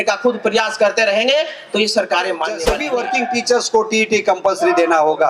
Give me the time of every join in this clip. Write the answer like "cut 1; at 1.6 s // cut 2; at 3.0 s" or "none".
cut 1; at 2.6 s